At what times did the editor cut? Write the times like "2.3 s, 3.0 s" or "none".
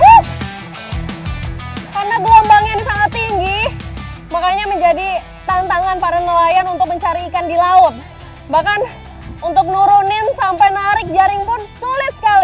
none